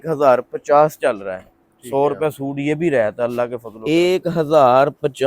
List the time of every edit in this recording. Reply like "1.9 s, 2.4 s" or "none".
3.7 s